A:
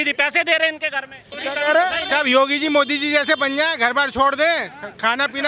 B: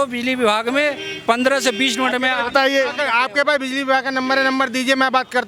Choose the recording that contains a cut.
A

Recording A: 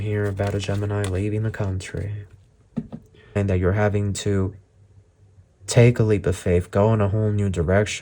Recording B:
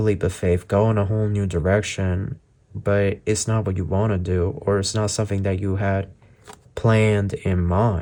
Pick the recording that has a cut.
A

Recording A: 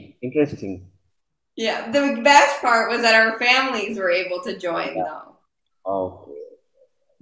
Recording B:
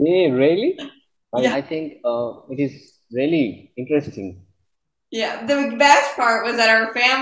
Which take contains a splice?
B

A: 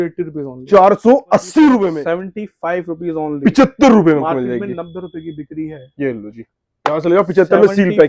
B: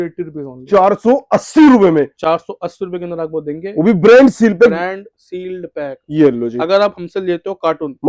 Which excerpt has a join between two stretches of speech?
A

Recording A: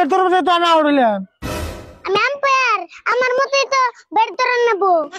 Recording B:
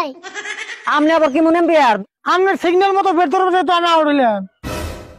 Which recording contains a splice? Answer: B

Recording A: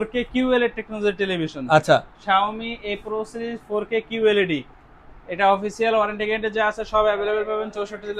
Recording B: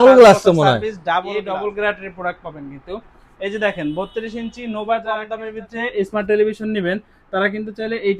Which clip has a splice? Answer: B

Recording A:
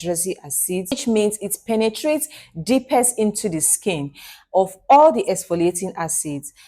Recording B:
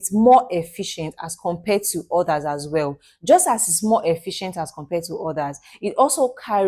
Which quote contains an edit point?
A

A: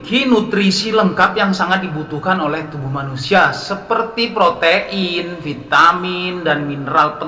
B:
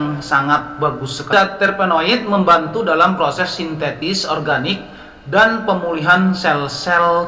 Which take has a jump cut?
B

